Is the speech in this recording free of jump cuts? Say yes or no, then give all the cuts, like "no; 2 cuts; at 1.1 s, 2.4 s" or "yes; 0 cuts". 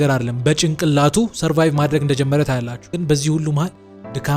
no; 1 cut; at 2.8 s